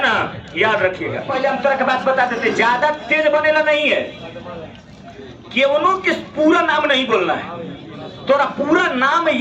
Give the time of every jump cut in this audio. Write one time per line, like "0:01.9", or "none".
0:01.3